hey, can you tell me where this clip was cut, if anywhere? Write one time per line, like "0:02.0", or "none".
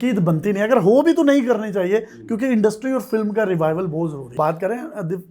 0:04.2